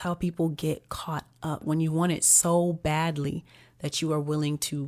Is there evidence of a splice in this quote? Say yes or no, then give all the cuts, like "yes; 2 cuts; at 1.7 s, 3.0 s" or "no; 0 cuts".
yes; 1 cut; at 1.6 s